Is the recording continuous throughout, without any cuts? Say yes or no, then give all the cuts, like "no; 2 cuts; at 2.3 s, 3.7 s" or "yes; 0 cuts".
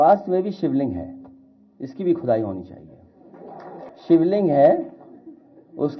no; 1 cut; at 3.9 s